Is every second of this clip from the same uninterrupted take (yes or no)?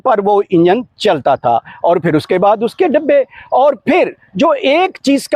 yes